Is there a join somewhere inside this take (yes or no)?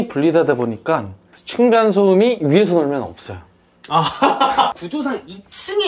yes